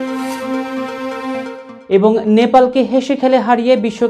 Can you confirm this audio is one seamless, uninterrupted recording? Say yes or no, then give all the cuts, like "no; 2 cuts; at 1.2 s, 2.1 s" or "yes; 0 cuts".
yes; 0 cuts